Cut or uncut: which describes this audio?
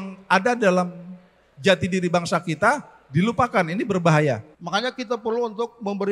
cut